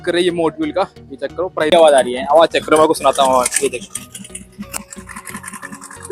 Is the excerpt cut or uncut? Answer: cut